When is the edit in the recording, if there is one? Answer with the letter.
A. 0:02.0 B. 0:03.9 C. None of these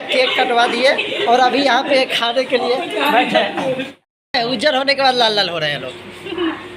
B